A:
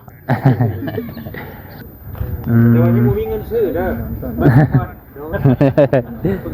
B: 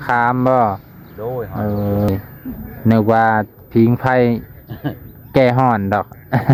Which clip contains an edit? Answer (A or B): A